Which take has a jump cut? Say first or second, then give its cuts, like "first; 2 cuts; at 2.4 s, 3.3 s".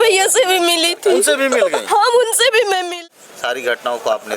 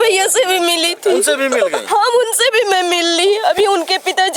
first; 1 cut; at 2.9 s